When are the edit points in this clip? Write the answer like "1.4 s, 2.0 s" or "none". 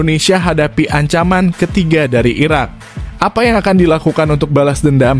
none